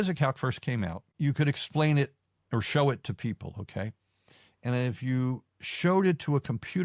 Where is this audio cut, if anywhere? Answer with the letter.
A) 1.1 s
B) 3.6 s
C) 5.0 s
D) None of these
A